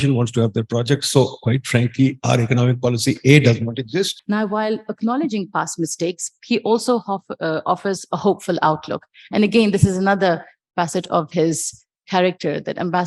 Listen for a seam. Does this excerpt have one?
yes; 1 cut; at 4.2 s

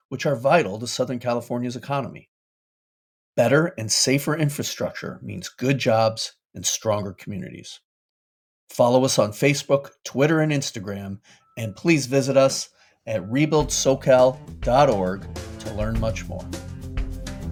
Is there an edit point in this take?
no; 0 cuts

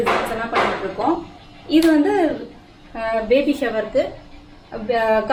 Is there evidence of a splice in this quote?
no; 0 cuts

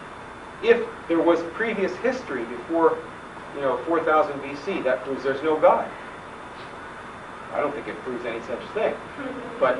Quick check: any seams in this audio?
yes; 1 cut; at 8.6 s

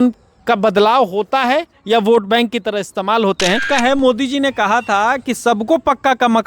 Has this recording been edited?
yes; 1 cut; at 3.6 s

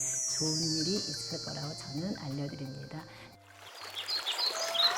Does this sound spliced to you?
yes; 1 cut; at 3.2 s

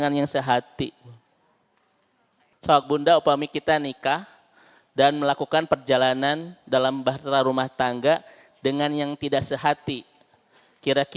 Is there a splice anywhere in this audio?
yes; 1 cut; at 2.6 s

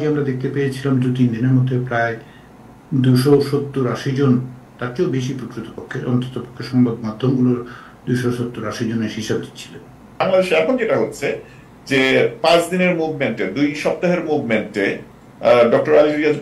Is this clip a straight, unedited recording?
no; 1 cut; at 10.3 s

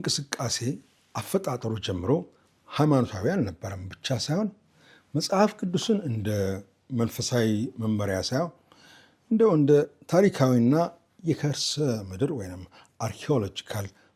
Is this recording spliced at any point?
no; 0 cuts

